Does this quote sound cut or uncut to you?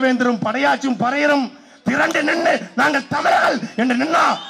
uncut